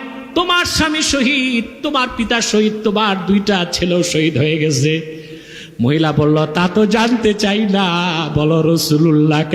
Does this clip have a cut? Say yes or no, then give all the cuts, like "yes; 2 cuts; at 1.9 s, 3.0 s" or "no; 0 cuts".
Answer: no; 0 cuts